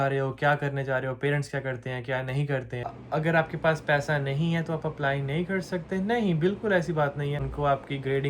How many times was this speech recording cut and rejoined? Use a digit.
2